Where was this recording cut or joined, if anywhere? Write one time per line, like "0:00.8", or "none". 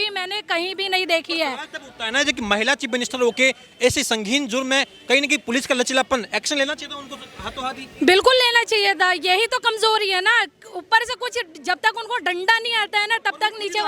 none